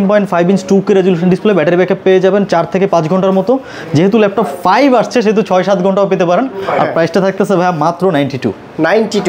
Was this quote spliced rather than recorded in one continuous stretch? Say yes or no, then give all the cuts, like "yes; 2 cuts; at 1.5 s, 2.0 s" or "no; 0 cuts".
no; 0 cuts